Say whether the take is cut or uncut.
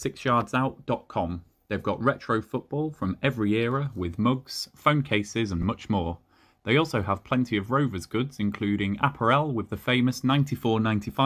uncut